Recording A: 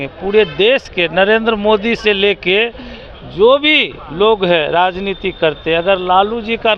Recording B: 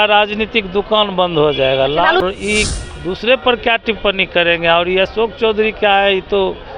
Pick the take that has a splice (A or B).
B